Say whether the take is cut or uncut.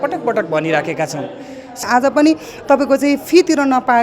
cut